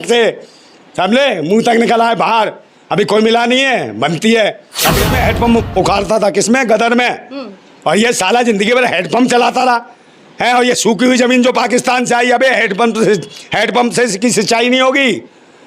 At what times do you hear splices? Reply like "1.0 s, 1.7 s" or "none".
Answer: 5.1 s

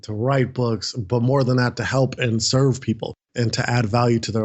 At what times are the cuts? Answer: none

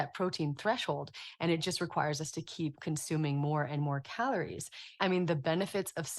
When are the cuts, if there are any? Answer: 5.0 s

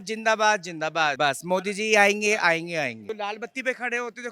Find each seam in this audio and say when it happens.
1.1 s, 3.0 s

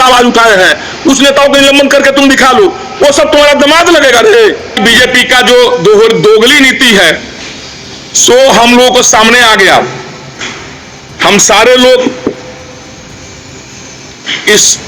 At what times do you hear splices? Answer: 4.8 s

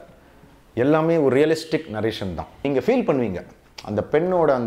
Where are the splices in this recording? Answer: 2.6 s

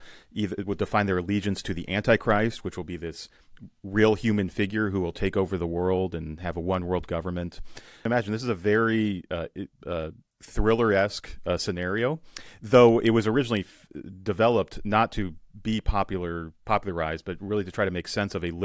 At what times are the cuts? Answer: 8.0 s

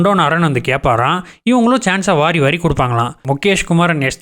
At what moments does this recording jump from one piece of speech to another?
3.2 s

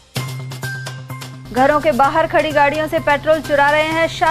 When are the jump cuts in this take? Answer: 1.2 s

